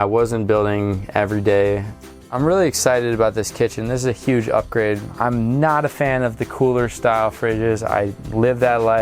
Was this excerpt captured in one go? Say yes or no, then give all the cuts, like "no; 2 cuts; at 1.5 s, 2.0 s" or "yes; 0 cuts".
no; 2 cuts; at 2.3 s, 5.1 s